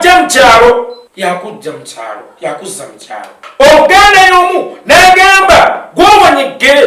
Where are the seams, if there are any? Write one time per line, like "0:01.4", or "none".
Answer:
0:01.0
0:03.4